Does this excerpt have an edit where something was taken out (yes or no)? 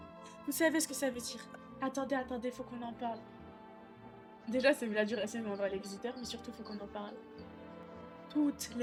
no